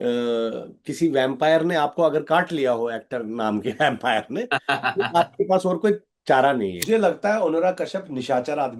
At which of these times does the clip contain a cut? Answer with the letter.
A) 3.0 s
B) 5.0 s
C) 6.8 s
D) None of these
C